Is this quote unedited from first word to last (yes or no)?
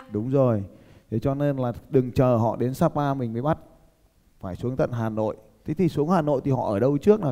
yes